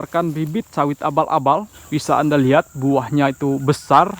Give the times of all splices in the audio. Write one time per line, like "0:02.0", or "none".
0:01.8